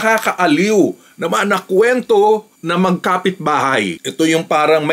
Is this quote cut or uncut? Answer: cut